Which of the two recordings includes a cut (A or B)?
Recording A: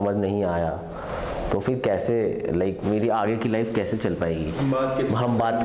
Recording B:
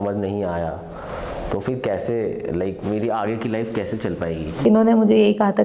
B